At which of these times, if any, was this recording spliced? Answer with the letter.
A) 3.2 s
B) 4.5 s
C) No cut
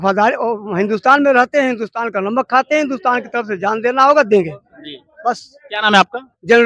C